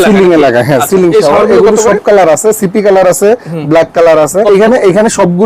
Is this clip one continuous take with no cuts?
no; 1 cut; at 4.4 s

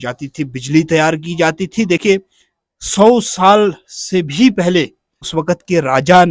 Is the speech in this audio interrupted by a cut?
yes; 1 cut; at 5.3 s

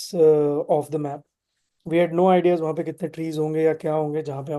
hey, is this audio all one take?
yes; 0 cuts

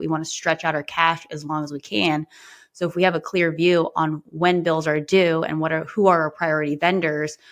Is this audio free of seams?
yes; 0 cuts

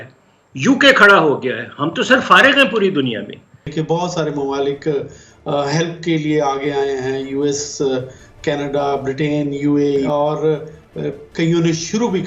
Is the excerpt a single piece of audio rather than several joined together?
no; 2 cuts; at 3.7 s, 10.1 s

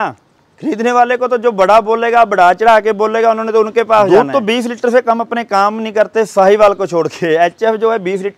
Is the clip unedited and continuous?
no; 1 cut; at 4.1 s

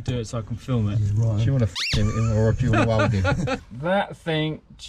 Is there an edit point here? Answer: yes; 1 cut; at 3.6 s

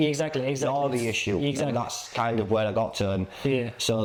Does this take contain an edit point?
no; 0 cuts

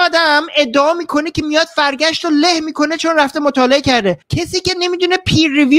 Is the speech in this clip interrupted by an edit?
yes; 1 cut; at 4.3 s

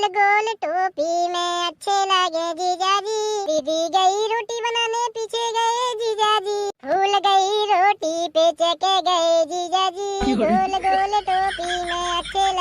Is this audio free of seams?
no; 2 cuts; at 3.4 s, 6.8 s

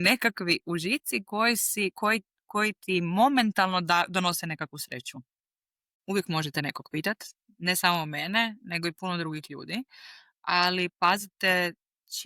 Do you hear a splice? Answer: yes; 1 cut; at 5.9 s

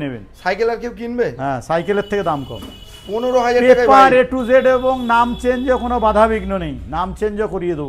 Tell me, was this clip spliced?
no; 0 cuts

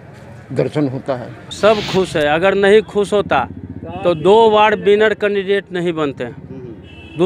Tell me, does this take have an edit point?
yes; 1 cut; at 1.4 s

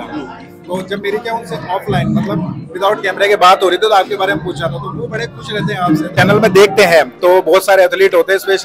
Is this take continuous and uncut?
no; 1 cut; at 6.2 s

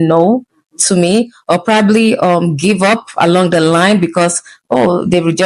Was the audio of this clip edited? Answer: no; 0 cuts

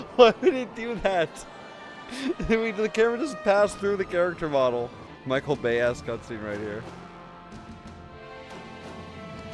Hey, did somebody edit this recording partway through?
no; 0 cuts

